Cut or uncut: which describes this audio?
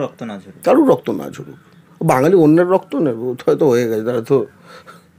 uncut